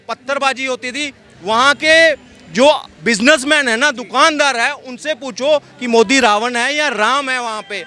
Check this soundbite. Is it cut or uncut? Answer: uncut